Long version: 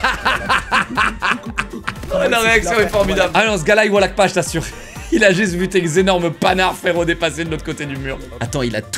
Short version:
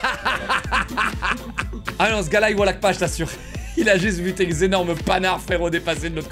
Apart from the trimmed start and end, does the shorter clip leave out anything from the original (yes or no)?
yes